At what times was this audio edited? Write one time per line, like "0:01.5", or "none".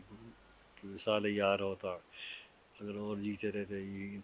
none